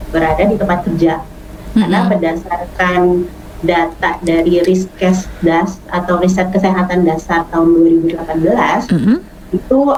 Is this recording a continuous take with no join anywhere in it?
yes; 0 cuts

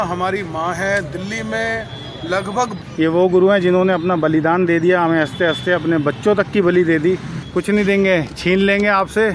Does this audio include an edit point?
yes; 2 cuts; at 2.7 s, 7.4 s

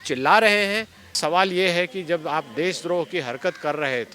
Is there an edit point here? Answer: yes; 1 cut; at 1.1 s

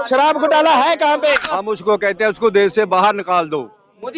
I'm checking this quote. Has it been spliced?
yes; 1 cut; at 1.5 s

